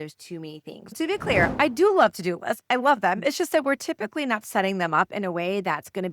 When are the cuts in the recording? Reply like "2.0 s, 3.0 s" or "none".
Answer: 1.0 s